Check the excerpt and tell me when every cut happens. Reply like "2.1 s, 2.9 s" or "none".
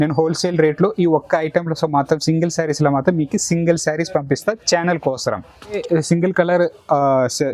5.8 s